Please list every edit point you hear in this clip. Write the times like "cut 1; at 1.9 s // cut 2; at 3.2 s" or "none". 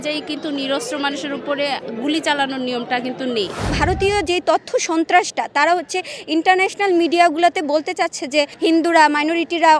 cut 1; at 3.7 s // cut 2; at 8.5 s

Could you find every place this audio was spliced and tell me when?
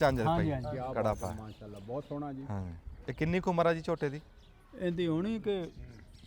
none

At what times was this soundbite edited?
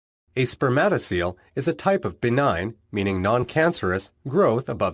none

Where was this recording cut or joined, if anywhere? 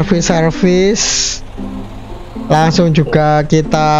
none

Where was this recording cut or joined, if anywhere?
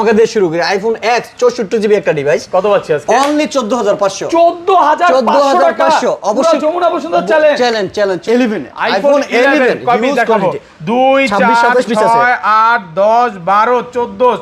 cut 1; at 8.2 s

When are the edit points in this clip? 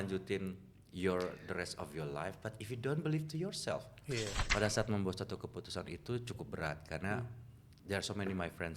cut 1; at 4.4 s

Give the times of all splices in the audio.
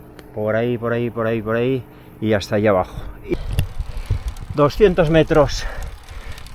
cut 1; at 3.3 s

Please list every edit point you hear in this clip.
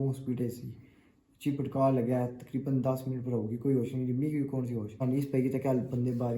cut 1; at 5.0 s

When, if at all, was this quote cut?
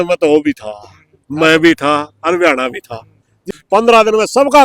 cut 1; at 3.5 s

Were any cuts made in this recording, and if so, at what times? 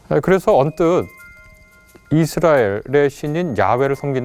none

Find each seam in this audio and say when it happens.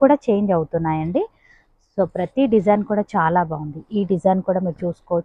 none

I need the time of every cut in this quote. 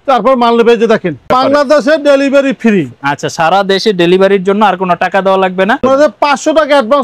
cut 1; at 1.3 s // cut 2; at 5.8 s

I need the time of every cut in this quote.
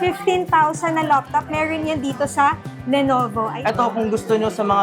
cut 1; at 3.5 s

